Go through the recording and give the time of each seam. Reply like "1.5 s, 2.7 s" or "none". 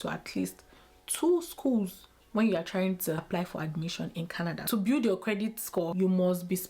3.2 s, 4.6 s, 5.9 s